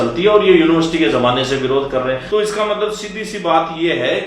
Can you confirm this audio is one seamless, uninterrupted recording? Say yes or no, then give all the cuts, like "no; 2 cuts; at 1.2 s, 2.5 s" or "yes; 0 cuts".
no; 1 cut; at 2.2 s